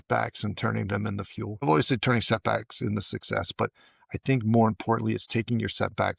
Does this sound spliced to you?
yes; 1 cut; at 1.6 s

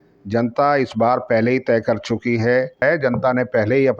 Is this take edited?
yes; 1 cut; at 2.8 s

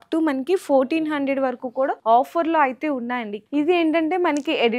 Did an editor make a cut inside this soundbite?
yes; 2 cuts; at 2.0 s, 3.3 s

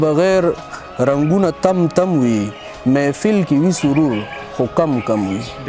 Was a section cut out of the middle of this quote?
no; 0 cuts

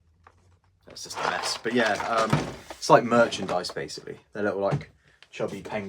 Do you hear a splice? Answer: yes; 1 cut; at 2.3 s

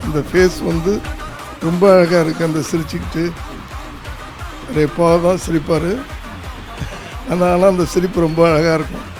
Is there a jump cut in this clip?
no; 0 cuts

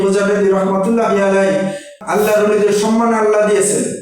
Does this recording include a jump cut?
yes; 1 cut; at 1.9 s

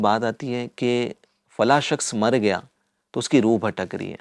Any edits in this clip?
no; 0 cuts

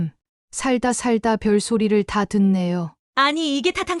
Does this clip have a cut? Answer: yes; 1 cut; at 3.0 s

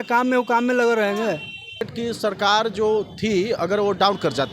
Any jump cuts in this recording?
yes; 1 cut; at 1.9 s

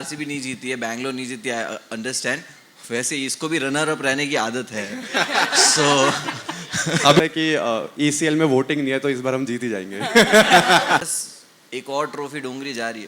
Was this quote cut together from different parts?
yes; 2 cuts; at 7.2 s, 11.1 s

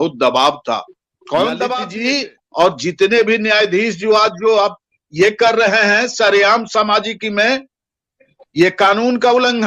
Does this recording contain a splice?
yes; 1 cut; at 1.9 s

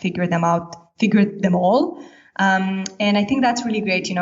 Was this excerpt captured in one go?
yes; 0 cuts

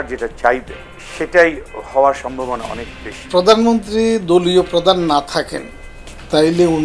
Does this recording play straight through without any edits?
no; 1 cut; at 3.3 s

